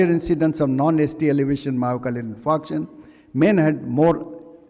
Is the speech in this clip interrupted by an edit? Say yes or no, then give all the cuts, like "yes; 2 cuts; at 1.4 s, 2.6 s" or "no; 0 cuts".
no; 0 cuts